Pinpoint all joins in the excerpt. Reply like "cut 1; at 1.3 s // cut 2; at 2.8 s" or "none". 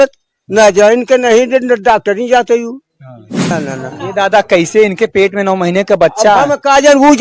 cut 1; at 3.3 s